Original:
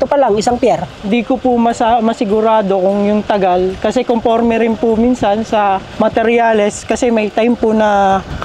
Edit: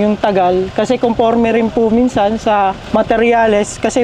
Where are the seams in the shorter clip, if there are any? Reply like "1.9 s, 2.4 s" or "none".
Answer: none